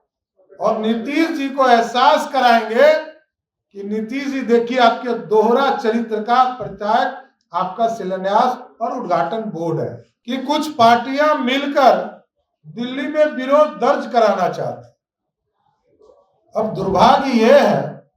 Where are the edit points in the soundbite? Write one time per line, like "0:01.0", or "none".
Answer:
0:10.1